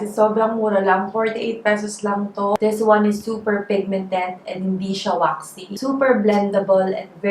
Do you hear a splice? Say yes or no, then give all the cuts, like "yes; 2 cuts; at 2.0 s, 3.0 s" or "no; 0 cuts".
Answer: yes; 1 cut; at 2.6 s